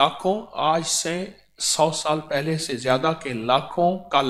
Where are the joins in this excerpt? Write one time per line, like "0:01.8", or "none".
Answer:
none